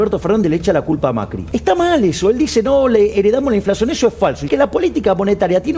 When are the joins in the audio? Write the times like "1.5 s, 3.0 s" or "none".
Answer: 1.4 s, 4.5 s